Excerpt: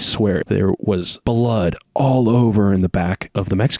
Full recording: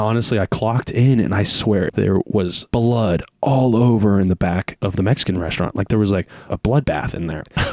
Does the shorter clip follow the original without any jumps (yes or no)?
yes